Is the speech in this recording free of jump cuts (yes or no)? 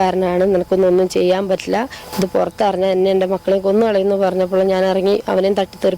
yes